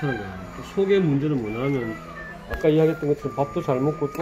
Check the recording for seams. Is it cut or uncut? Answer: uncut